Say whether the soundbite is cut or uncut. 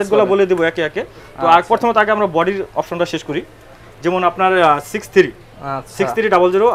uncut